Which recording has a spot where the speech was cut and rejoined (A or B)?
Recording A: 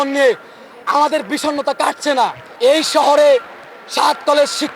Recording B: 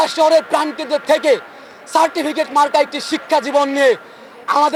A